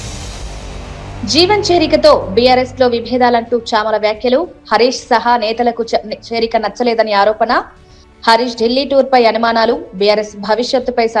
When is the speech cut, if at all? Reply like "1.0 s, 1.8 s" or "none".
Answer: 1.2 s